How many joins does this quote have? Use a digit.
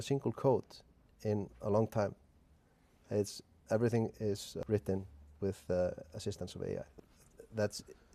3